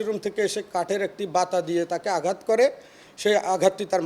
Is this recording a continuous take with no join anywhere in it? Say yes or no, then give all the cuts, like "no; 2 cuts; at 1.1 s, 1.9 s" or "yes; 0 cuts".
no; 1 cut; at 3.1 s